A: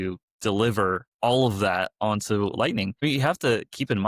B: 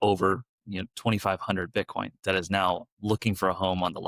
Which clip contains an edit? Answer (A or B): A